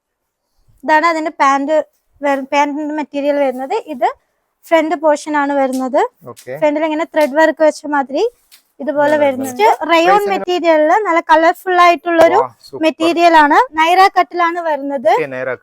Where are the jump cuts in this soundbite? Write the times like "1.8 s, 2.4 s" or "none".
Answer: 9.5 s, 13.7 s